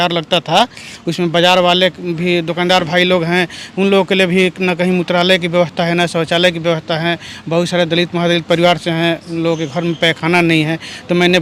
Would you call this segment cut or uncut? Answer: uncut